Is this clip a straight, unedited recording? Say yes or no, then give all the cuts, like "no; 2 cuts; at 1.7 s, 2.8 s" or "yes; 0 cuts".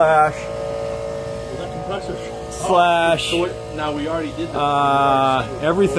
yes; 0 cuts